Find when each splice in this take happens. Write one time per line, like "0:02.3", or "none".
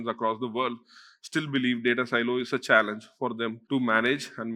0:03.6